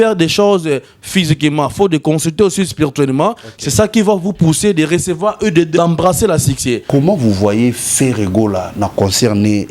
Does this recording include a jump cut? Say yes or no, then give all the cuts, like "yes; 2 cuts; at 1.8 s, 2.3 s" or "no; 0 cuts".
yes; 2 cuts; at 5.8 s, 6.8 s